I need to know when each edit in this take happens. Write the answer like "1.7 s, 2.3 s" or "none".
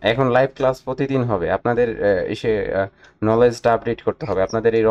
none